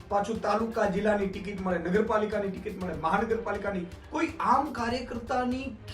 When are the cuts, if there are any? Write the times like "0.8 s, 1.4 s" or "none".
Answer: none